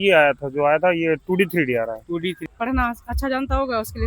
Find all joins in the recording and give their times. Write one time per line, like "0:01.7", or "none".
0:02.4